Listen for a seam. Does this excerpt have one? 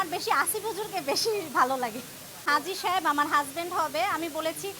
yes; 1 cut; at 2.4 s

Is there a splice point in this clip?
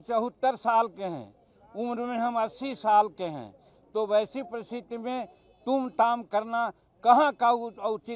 no; 0 cuts

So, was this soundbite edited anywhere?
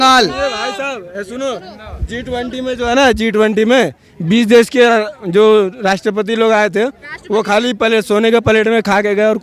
no; 0 cuts

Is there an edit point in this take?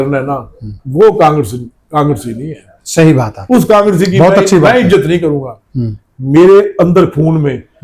no; 0 cuts

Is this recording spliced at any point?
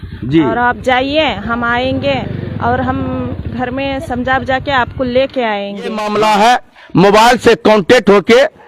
yes; 1 cut; at 6.0 s

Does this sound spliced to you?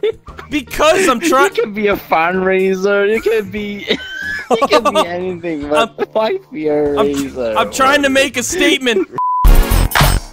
yes; 1 cut; at 9.3 s

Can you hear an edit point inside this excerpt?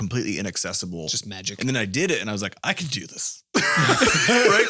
yes; 1 cut; at 1.5 s

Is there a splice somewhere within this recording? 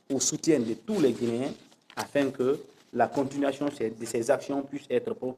no; 0 cuts

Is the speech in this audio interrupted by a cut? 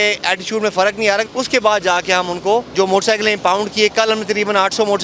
yes; 2 cuts; at 1.2 s, 2.7 s

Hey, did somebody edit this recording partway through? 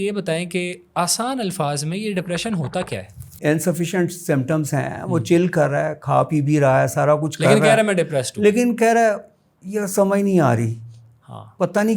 yes; 1 cut; at 3.3 s

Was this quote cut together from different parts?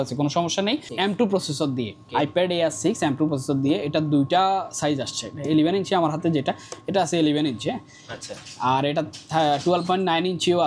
yes; 2 cuts; at 0.9 s, 2.0 s

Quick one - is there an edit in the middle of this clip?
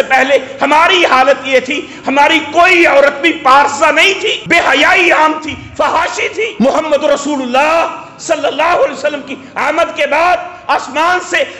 yes; 2 cuts; at 4.4 s, 6.5 s

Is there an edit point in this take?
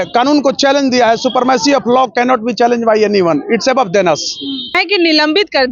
yes; 1 cut; at 4.8 s

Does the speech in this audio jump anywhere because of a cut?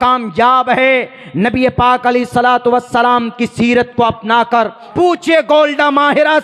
yes; 1 cut; at 4.8 s

